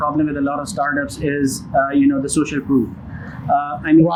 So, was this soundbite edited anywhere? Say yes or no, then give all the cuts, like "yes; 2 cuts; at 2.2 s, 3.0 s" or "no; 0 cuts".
no; 0 cuts